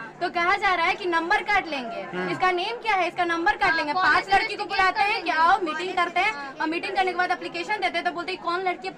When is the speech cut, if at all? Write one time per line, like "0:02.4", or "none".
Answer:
none